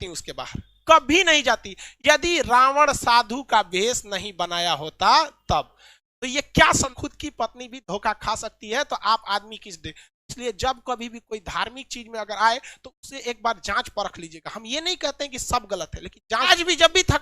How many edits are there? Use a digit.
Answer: 2